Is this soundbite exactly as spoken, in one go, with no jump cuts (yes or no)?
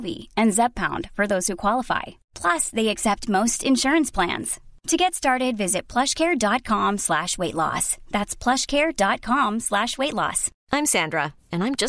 yes